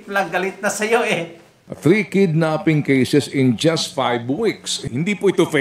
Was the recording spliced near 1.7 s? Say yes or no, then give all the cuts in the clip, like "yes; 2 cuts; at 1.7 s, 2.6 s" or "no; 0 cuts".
yes; 1 cut; at 1.7 s